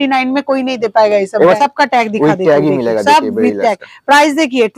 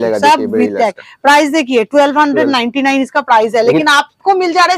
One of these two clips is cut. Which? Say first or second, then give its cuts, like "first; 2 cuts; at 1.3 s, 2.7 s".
first; 1 cut; at 1.6 s